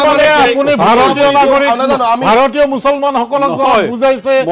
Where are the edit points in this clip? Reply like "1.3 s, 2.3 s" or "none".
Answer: none